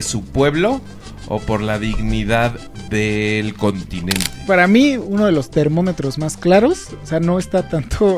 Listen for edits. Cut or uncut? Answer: cut